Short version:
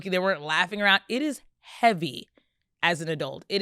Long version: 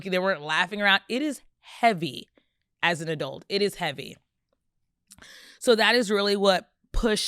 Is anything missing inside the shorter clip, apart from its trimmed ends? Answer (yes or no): no